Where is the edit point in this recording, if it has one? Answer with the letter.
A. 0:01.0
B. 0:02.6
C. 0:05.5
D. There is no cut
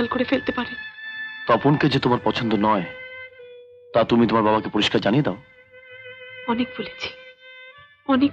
D